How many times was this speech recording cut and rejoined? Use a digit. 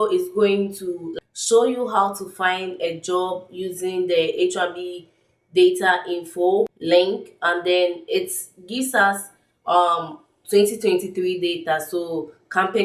2